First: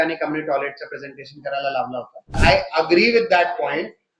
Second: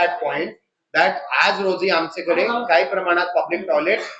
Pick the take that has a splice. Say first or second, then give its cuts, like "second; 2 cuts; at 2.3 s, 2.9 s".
first; 1 cut; at 2.4 s